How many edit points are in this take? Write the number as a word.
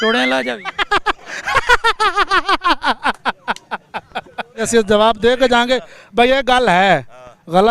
one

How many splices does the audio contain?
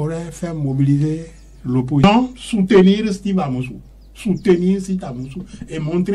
one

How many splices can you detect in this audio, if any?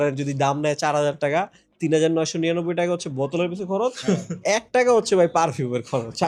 zero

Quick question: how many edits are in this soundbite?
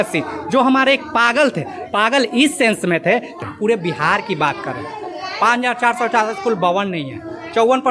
one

